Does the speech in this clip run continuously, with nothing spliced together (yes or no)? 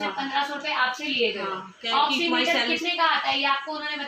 yes